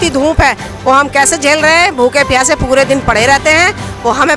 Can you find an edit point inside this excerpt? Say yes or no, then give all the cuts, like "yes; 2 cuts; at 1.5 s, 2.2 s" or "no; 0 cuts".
no; 0 cuts